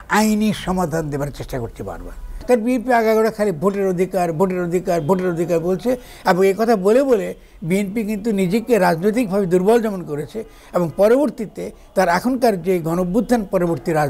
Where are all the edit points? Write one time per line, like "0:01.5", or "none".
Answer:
0:02.3